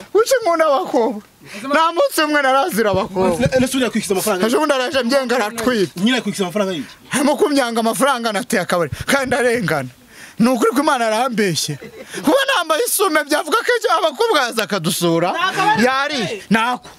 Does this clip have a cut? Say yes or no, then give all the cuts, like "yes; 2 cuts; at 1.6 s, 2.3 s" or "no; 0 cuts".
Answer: no; 0 cuts